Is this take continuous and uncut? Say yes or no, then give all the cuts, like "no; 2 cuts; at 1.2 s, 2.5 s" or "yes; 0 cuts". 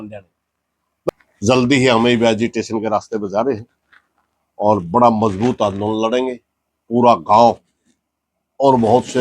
no; 1 cut; at 1.1 s